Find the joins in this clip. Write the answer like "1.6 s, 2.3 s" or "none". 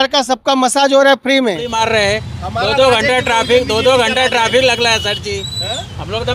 1.7 s